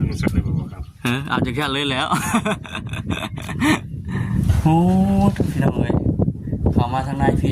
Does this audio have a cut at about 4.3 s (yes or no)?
yes